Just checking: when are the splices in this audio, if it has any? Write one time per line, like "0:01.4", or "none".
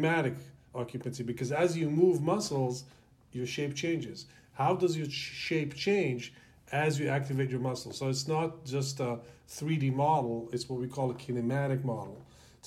none